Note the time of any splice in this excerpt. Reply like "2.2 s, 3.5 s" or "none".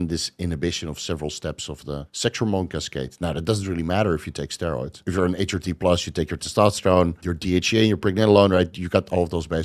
2.1 s, 5.0 s, 7.3 s